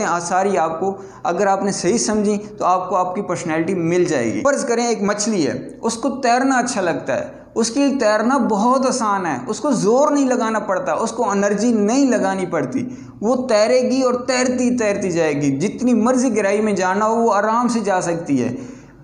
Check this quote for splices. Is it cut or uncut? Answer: cut